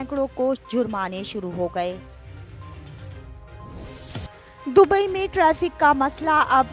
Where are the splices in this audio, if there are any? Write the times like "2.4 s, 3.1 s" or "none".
2.0 s, 4.0 s